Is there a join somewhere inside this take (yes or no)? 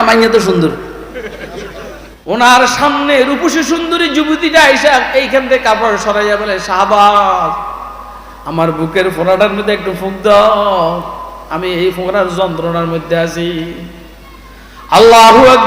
yes